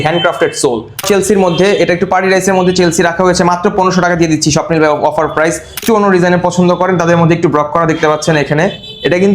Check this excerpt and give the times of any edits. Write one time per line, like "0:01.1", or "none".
0:01.0
0:05.8